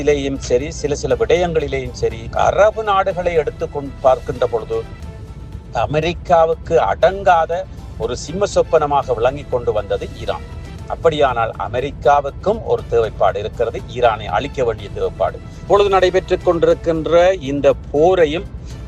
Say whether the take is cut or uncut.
cut